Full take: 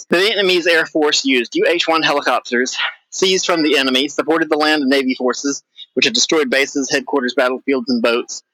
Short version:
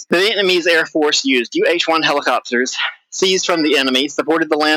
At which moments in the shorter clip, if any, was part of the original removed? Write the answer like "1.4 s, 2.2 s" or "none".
none